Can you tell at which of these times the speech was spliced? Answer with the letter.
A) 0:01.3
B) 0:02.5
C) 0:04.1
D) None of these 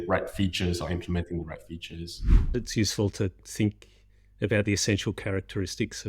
B